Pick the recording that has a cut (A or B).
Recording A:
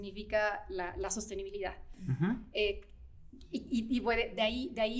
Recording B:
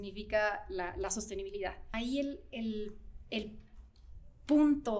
B